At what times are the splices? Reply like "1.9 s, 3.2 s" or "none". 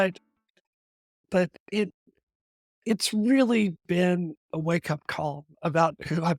1.2 s